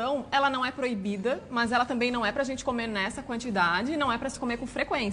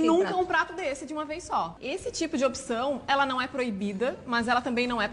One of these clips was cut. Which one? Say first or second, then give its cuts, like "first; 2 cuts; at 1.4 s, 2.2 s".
second; 1 cut; at 1.8 s